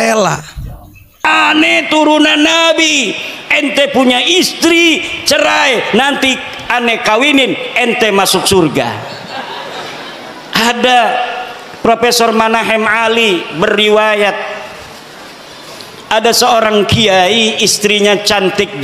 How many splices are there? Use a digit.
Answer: 1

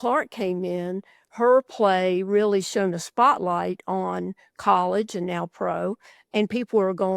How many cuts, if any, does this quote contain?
0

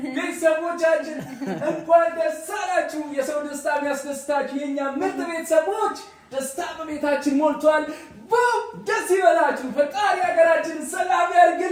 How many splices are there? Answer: 0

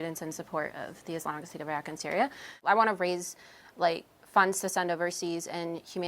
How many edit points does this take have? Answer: 1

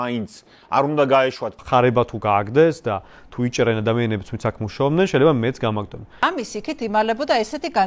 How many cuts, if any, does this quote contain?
2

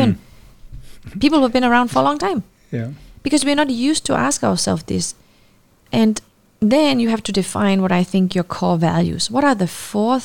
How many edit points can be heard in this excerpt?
0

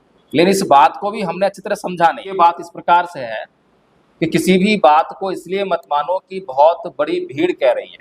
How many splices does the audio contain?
1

